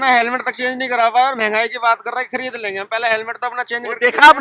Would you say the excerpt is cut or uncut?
uncut